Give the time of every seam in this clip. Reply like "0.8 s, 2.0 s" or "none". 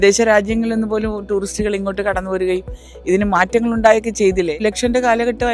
4.6 s